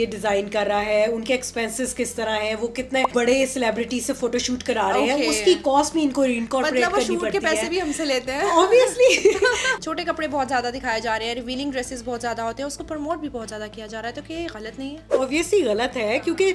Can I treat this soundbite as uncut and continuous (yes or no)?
no